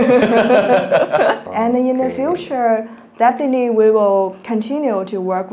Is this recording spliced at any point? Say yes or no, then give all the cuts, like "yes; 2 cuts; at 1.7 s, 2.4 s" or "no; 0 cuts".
yes; 1 cut; at 1.5 s